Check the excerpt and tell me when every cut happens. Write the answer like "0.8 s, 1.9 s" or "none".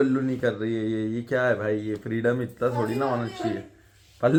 none